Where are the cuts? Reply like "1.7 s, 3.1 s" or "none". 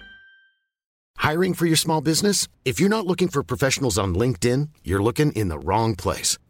1.1 s

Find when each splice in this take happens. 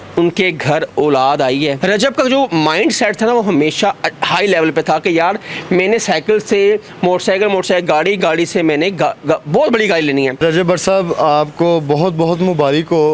1.8 s, 10.4 s

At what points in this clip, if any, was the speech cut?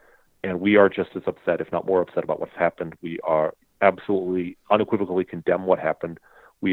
none

